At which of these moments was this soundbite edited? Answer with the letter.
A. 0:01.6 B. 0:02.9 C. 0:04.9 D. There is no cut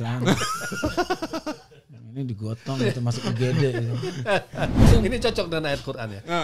C